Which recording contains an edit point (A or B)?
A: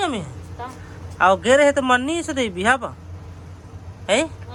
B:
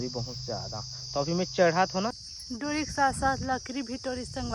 B